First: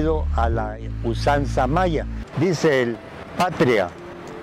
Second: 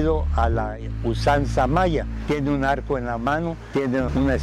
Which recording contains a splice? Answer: first; 1 cut; at 2.2 s

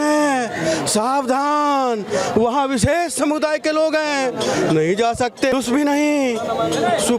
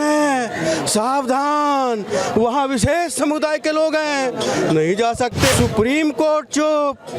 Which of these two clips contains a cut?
second; 1 cut; at 5.5 s

